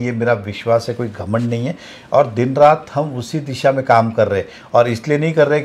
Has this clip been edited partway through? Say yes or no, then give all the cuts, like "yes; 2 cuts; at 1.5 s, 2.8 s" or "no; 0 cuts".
no; 0 cuts